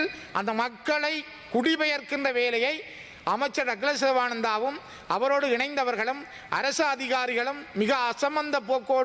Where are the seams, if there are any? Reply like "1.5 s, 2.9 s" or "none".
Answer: none